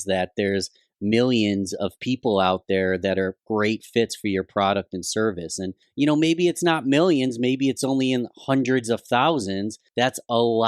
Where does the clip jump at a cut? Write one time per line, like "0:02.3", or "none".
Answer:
0:05.8
0:09.8